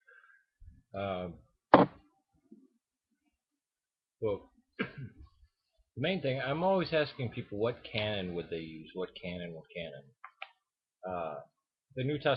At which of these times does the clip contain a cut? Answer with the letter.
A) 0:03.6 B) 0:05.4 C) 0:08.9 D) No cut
B